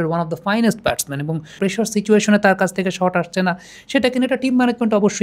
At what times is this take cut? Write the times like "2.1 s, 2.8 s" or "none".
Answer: 1.5 s